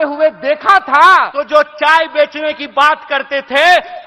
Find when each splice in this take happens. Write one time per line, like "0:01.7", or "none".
0:01.4